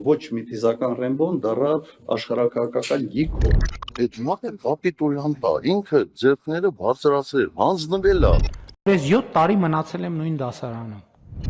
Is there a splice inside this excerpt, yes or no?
no